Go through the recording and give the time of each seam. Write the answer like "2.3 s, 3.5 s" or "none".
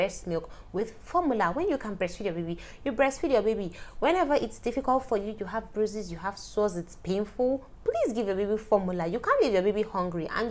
none